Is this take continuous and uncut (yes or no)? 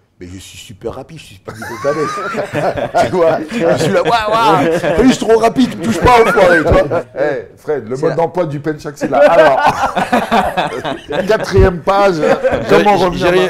no